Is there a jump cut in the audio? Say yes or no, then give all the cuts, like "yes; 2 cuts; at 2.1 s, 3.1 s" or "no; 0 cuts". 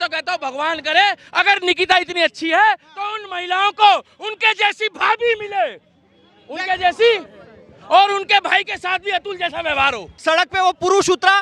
yes; 1 cut; at 10.1 s